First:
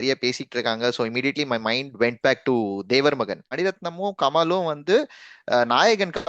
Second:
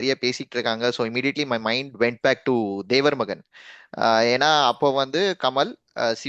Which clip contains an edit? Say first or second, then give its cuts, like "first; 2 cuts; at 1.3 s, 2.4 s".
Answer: first; 1 cut; at 3.4 s